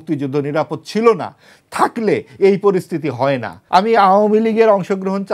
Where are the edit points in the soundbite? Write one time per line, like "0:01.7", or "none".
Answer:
0:03.5